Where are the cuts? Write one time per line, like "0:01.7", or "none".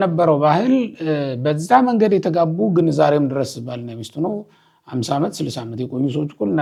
none